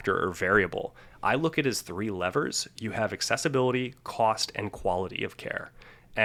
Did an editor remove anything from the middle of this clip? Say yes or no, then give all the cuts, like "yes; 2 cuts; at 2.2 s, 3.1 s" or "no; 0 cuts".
no; 0 cuts